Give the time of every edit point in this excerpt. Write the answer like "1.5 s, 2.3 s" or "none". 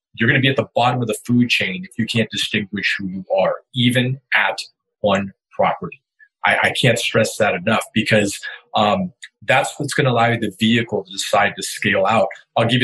none